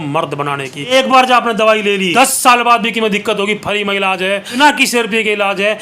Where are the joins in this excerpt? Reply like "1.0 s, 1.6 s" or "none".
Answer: 0.9 s, 2.1 s, 4.6 s